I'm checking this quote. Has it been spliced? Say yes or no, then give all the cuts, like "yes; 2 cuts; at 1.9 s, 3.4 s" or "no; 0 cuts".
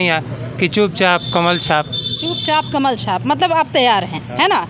no; 0 cuts